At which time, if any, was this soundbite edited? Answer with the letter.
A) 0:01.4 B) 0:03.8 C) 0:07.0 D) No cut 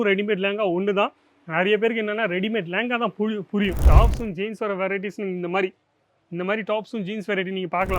B